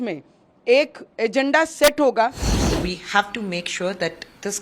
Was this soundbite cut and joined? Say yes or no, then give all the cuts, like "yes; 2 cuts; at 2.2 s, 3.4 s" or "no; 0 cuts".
yes; 1 cut; at 2.5 s